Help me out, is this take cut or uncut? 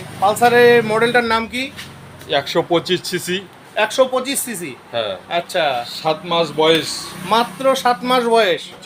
uncut